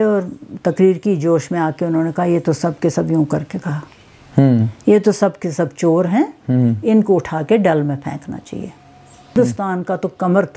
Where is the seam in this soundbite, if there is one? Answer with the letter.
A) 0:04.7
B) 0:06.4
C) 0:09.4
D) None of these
C